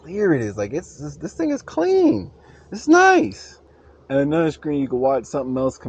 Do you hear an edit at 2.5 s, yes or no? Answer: no